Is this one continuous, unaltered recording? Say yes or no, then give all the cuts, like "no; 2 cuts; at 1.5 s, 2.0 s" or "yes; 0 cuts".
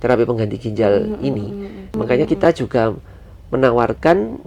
no; 1 cut; at 1.9 s